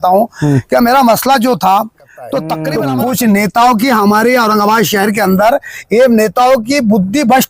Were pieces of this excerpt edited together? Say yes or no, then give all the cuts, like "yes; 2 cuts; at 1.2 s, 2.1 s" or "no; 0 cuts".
yes; 1 cut; at 2.6 s